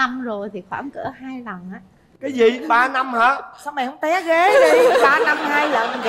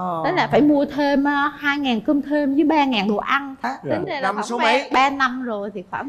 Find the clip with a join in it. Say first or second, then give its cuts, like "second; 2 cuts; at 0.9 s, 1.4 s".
second; 1 cut; at 3.6 s